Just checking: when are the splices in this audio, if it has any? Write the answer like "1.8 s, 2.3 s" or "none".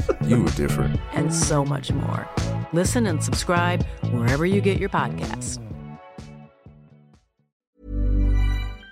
7.5 s